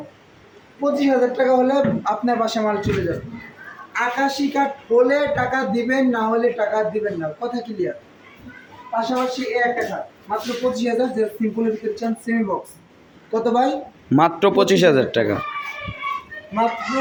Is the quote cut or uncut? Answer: uncut